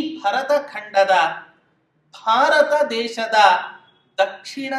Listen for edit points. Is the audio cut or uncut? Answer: uncut